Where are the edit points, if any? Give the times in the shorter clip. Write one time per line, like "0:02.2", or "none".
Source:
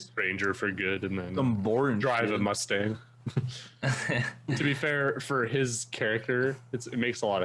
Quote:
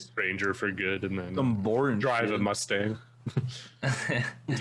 none